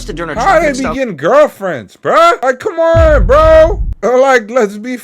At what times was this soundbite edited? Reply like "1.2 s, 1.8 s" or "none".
2.4 s, 3.9 s